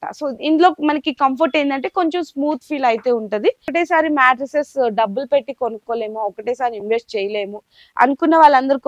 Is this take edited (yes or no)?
yes